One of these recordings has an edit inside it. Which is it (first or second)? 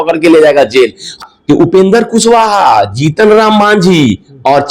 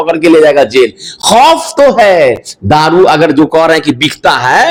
first